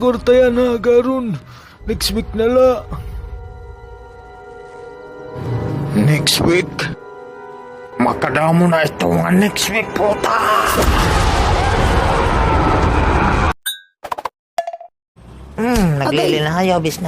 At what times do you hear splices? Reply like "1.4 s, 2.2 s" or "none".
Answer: 14.9 s